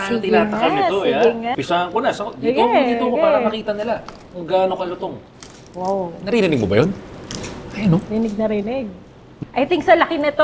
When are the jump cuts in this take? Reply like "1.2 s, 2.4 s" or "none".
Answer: 1.6 s, 9.4 s